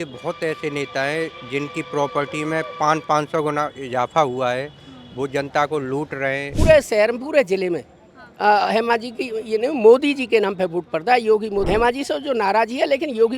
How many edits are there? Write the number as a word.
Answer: two